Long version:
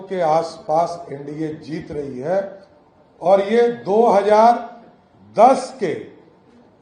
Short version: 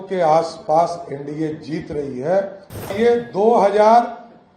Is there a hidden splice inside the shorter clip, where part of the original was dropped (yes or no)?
yes